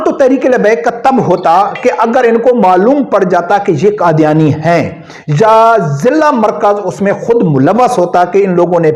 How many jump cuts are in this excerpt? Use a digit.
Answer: 0